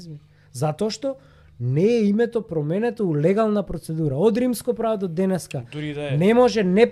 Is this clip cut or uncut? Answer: uncut